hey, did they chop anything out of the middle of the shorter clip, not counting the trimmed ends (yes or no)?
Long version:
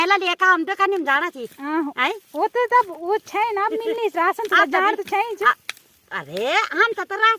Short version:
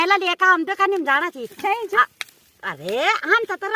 yes